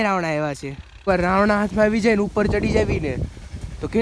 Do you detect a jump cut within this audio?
yes; 1 cut; at 1.0 s

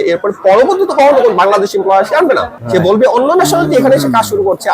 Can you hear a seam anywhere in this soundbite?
no; 0 cuts

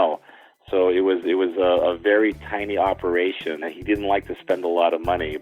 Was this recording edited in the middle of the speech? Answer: yes; 1 cut; at 3.7 s

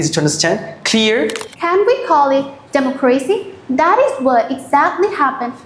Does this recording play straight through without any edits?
no; 1 cut; at 1.4 s

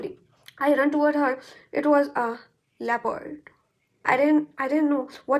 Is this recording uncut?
no; 1 cut; at 3.9 s

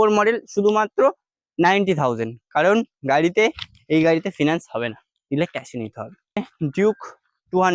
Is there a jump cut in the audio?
yes; 1 cut; at 6.5 s

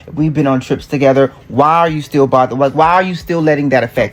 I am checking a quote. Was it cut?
no; 0 cuts

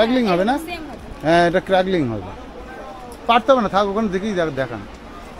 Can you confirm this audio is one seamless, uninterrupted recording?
yes; 0 cuts

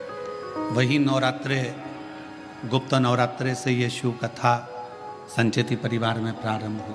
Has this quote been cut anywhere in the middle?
no; 0 cuts

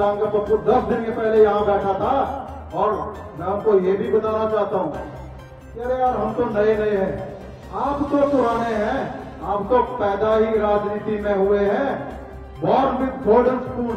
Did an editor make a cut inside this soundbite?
no; 0 cuts

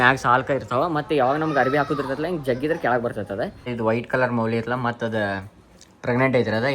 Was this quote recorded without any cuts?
no; 1 cut; at 3.7 s

